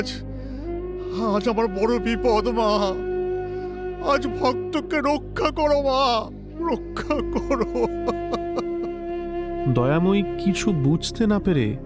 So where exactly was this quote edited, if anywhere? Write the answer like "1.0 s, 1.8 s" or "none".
9.7 s